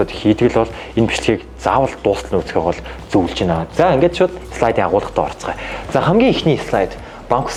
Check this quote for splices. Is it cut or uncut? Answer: uncut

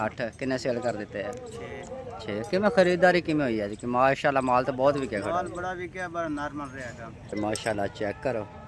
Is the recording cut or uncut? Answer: cut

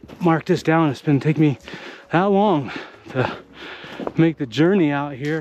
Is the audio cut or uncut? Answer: uncut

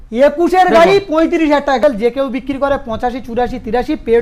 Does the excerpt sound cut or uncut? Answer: cut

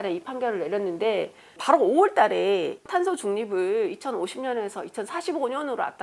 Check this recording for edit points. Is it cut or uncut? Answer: cut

